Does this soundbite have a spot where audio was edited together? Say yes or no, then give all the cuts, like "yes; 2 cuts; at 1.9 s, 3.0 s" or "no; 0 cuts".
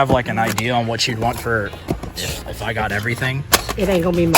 yes; 1 cut; at 3.4 s